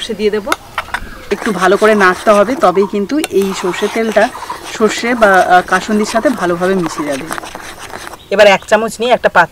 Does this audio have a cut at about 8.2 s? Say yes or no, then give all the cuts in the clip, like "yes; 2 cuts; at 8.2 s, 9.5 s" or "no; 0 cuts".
yes; 2 cuts; at 1.1 s, 8.2 s